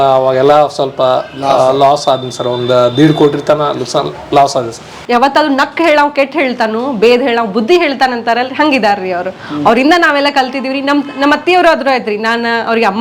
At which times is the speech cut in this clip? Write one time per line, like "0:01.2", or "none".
0:04.9